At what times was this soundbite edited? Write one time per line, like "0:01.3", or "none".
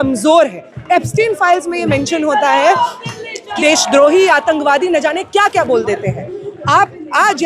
0:03.5